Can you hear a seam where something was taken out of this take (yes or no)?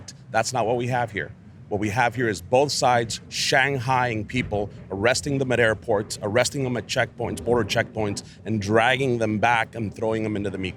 no